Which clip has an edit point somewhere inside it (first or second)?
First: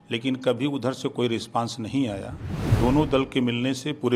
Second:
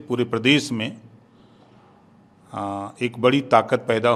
first